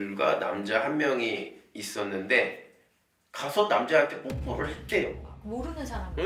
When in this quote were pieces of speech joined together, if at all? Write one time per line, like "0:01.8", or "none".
none